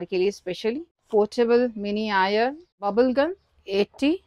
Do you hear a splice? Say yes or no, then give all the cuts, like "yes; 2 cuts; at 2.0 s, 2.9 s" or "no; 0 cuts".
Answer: yes; 2 cuts; at 1.0 s, 2.9 s